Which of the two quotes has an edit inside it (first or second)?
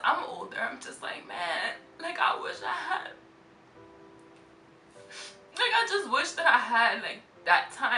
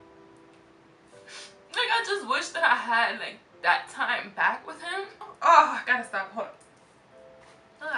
second